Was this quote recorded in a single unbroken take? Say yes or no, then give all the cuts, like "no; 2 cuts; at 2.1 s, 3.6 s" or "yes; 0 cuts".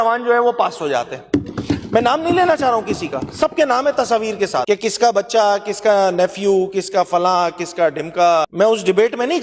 no; 2 cuts; at 4.6 s, 8.5 s